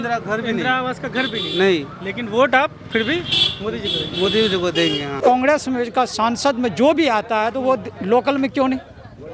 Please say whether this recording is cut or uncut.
cut